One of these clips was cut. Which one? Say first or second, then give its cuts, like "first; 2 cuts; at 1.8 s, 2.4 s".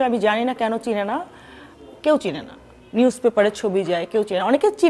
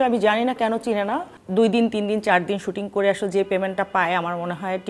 second; 1 cut; at 1.3 s